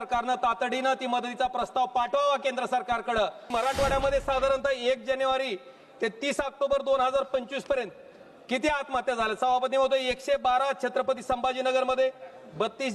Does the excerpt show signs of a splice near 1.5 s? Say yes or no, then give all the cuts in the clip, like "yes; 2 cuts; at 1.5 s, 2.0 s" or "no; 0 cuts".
no; 1 cut; at 3.5 s